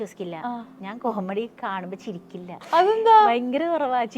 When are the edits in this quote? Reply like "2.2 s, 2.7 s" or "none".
2.5 s